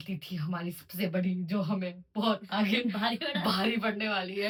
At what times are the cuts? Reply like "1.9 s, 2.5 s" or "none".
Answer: none

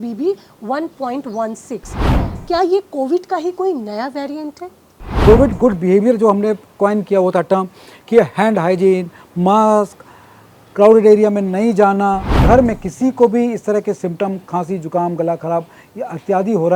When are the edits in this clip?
2.2 s, 5.1 s, 12.4 s

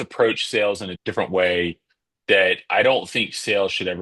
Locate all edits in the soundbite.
0.9 s

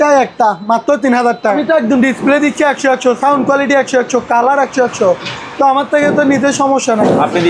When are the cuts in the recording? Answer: 1.5 s

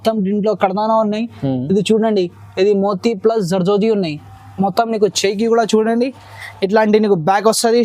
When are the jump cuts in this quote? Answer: none

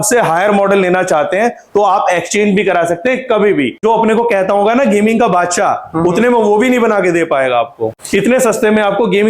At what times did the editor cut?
3.7 s, 8.0 s

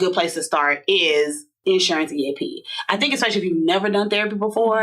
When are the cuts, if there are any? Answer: 1.5 s

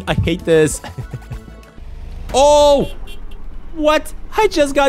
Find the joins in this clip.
1.8 s

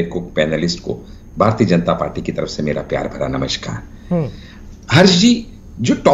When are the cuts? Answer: none

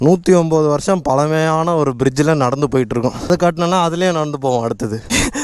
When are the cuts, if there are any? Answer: 3.2 s

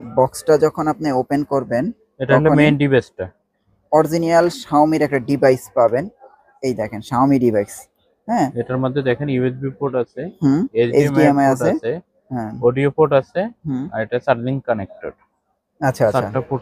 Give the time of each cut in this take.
none

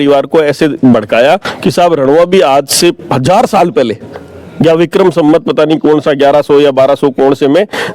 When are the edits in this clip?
none

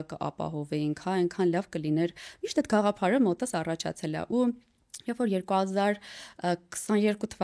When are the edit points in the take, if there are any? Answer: none

